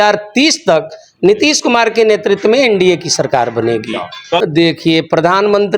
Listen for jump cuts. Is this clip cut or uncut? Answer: cut